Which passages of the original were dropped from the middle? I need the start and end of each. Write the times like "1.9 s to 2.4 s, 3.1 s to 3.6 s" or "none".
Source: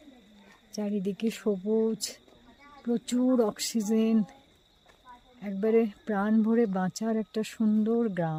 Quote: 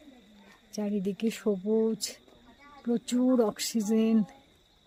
none

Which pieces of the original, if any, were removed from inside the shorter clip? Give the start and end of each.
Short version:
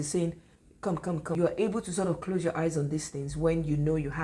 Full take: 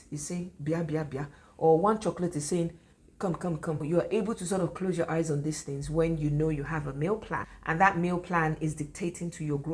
3.7 s to 3.9 s

